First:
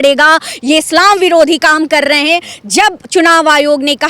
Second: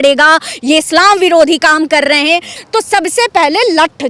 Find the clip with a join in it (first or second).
second